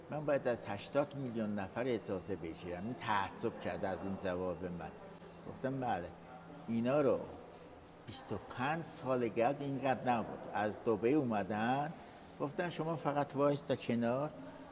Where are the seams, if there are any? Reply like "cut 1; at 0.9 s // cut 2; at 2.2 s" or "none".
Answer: none